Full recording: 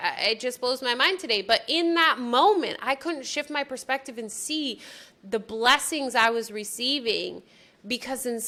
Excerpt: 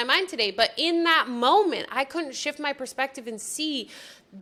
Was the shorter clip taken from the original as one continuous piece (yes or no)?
yes